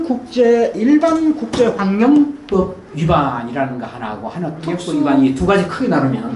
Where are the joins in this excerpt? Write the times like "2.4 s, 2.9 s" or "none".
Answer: 4.8 s